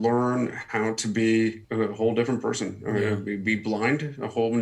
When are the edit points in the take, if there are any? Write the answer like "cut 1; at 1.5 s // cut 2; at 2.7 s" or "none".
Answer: cut 1; at 1.6 s

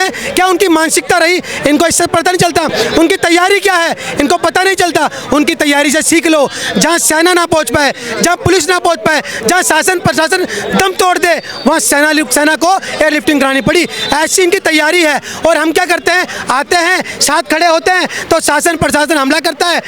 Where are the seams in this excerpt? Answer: none

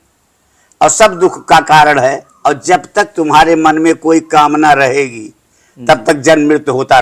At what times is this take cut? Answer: cut 1; at 2.3 s

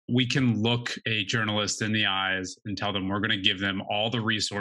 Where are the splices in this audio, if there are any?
cut 1; at 0.9 s

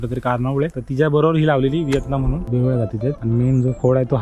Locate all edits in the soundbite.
cut 1; at 2.4 s

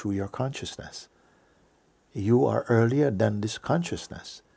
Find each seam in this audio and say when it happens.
none

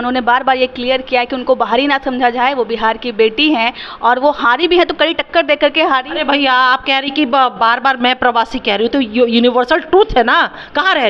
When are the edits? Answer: none

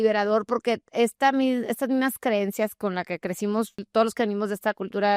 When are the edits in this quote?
cut 1; at 3.8 s

